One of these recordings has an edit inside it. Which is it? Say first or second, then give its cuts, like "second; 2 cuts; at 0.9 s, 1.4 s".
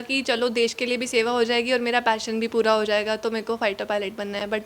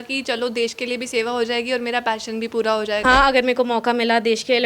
second; 1 cut; at 3.0 s